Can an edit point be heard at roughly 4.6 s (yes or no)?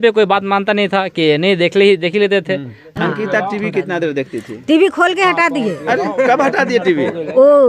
no